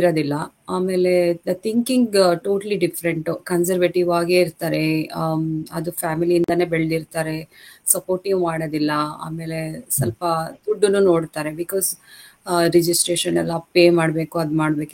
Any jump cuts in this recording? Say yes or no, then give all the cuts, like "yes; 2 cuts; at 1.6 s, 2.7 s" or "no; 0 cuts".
no; 0 cuts